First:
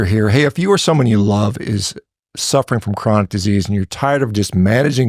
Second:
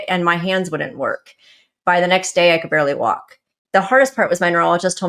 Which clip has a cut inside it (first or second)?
second